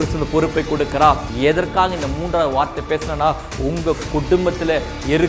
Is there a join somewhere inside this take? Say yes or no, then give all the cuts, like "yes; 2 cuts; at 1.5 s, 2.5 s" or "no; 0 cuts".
yes; 1 cut; at 1.2 s